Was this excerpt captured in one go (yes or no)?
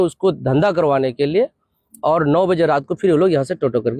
yes